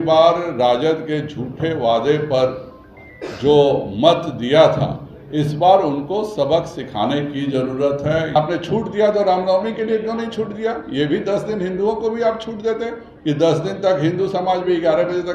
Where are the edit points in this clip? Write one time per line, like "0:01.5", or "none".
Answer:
0:08.4